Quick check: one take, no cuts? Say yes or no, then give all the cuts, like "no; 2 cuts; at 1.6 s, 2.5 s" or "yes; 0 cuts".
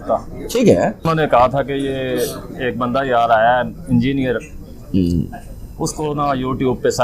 no; 1 cut; at 1.1 s